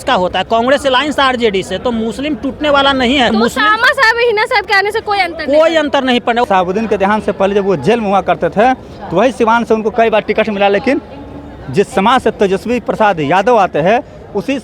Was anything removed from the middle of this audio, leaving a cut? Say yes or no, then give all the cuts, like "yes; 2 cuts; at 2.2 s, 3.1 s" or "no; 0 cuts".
yes; 2 cuts; at 3.3 s, 6.4 s